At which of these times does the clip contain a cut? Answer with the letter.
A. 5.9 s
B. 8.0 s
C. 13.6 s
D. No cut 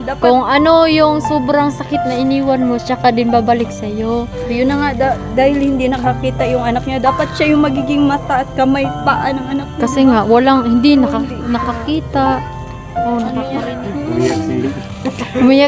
C